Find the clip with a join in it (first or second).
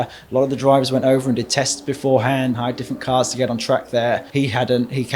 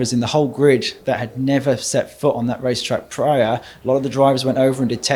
first